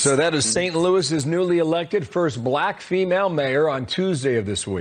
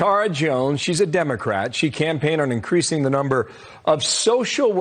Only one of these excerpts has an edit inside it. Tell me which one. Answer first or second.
first